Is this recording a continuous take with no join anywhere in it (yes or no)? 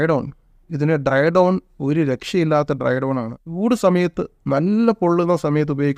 no